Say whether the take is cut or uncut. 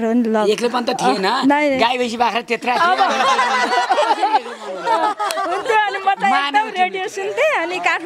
uncut